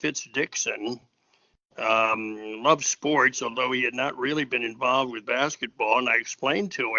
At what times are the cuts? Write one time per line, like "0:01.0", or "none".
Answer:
none